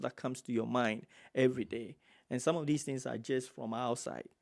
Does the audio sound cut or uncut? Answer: uncut